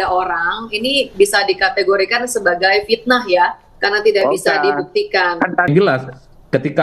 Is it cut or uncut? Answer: cut